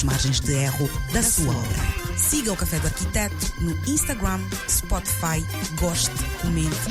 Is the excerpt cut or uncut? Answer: uncut